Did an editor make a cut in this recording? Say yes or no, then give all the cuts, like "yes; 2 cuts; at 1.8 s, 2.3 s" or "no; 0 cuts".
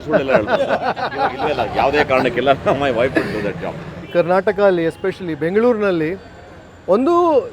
yes; 1 cut; at 4.1 s